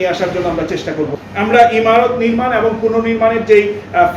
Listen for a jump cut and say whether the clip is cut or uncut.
cut